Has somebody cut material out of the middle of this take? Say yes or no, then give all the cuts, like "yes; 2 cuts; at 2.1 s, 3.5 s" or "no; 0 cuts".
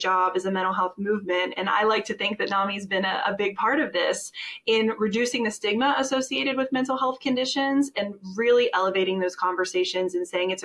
no; 0 cuts